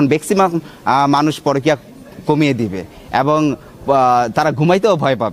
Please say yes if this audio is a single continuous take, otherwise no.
yes